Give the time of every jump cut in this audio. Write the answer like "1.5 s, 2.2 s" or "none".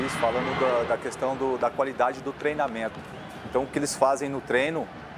none